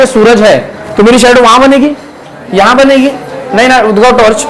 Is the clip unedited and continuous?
yes; 0 cuts

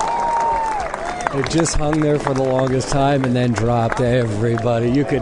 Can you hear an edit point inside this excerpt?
yes; 1 cut; at 0.9 s

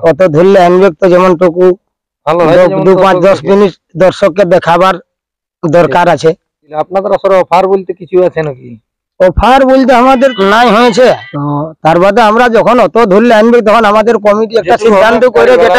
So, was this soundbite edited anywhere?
no; 0 cuts

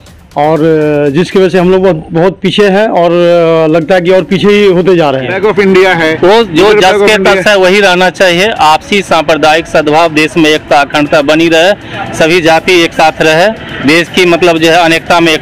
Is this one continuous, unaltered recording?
no; 1 cut; at 5.3 s

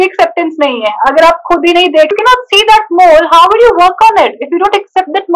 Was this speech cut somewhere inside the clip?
yes; 1 cut; at 2.1 s

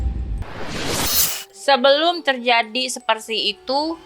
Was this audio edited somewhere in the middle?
yes; 1 cut; at 1.4 s

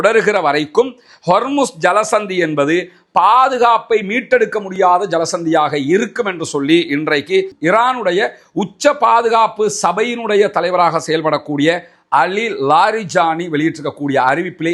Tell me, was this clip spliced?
no; 0 cuts

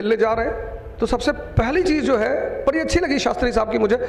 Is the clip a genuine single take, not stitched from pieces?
yes; 0 cuts

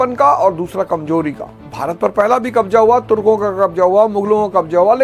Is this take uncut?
no; 1 cut; at 1.6 s

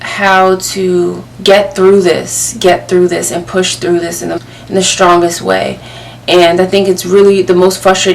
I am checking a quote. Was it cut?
yes; 2 cuts; at 1.3 s, 4.4 s

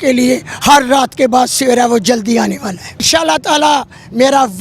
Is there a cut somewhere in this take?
yes; 1 cut; at 3.0 s

